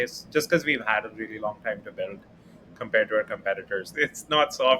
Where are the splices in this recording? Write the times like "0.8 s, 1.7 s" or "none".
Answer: 3.9 s